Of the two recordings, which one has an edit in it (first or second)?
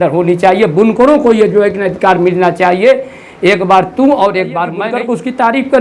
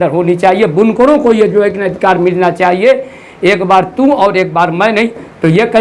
first